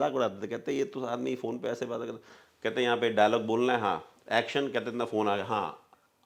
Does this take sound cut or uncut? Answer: uncut